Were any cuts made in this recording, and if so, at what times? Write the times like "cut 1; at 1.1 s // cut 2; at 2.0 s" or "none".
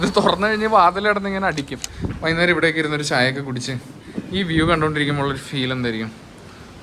cut 1; at 1.8 s